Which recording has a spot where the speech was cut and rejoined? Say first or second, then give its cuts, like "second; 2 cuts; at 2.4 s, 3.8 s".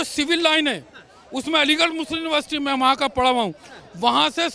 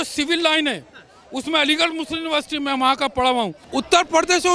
second; 1 cut; at 3.6 s